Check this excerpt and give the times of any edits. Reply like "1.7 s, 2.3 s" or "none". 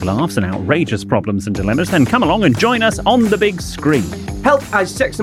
none